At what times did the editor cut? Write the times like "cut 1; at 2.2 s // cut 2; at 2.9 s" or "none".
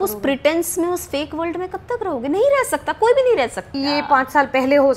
cut 1; at 3.7 s